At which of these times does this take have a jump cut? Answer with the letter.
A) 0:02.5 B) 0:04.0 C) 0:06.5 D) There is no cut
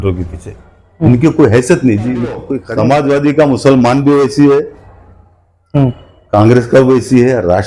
A